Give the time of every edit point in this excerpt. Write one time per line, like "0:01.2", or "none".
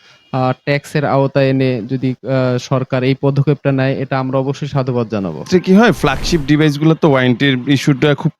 0:05.5